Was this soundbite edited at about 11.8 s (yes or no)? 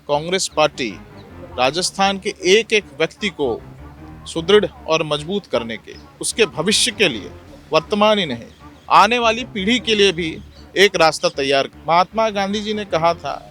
yes